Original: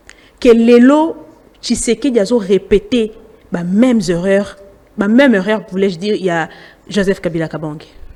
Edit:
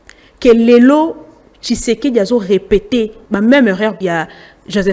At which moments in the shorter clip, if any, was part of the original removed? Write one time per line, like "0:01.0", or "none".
0:03.2
0:04.0